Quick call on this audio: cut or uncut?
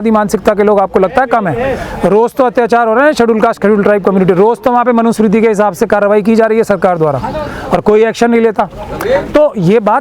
uncut